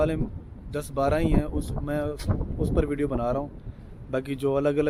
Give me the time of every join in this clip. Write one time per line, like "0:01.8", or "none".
none